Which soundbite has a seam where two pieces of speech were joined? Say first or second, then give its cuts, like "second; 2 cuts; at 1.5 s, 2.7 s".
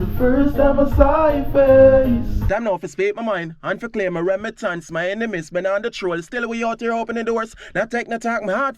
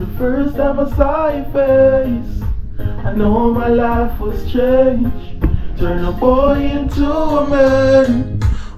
first; 2 cuts; at 2.4 s, 4.9 s